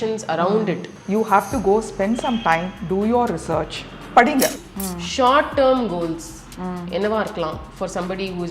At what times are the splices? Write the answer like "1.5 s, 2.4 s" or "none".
0.9 s, 4.6 s